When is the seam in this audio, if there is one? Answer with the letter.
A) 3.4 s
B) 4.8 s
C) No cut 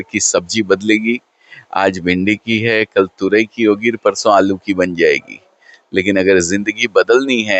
C